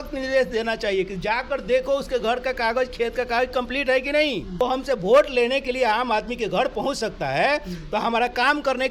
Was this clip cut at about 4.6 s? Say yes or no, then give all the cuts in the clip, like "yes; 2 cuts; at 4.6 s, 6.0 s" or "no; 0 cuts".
yes; 1 cut; at 4.6 s